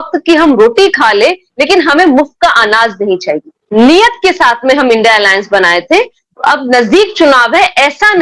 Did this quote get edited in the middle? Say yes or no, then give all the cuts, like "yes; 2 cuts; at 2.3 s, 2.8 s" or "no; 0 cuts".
yes; 1 cut; at 3.6 s